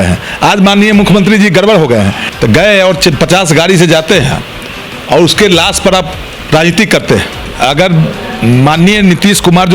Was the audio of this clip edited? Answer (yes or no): yes